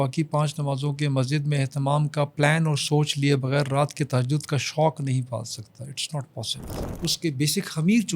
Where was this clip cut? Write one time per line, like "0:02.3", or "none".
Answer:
0:06.8